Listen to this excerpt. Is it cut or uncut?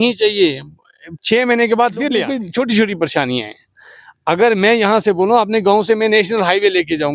cut